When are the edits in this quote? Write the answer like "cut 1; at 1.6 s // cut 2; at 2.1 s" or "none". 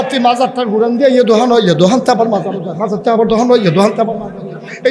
none